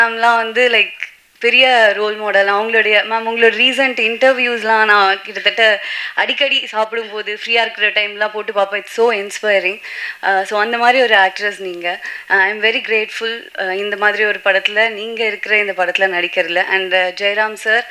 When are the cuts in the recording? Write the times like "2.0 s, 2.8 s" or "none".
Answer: none